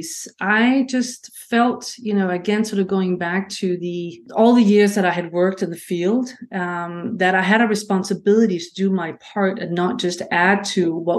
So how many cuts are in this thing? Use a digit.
1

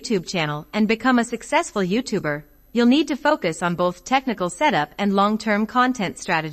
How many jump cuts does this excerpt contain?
1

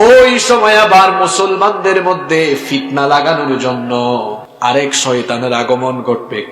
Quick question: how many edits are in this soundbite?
1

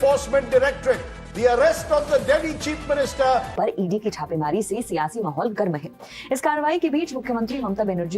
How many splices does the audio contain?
1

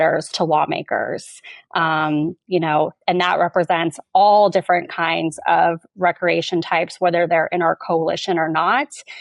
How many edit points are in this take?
0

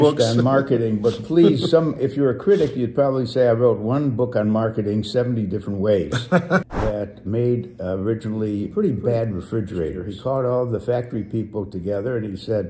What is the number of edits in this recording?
2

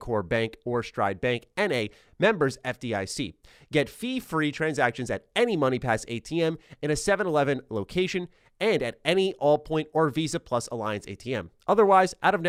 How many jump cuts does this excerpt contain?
0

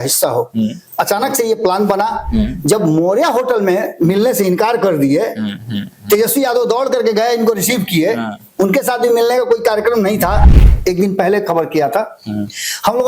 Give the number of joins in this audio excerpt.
1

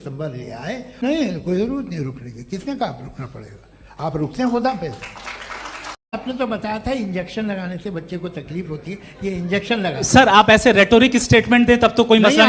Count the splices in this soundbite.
2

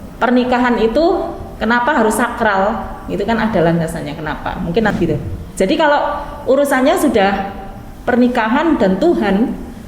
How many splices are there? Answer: 1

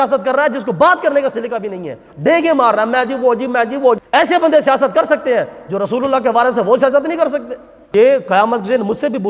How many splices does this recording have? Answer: 2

